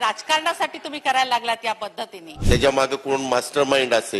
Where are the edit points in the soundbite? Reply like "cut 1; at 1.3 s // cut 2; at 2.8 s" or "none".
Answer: cut 1; at 2.3 s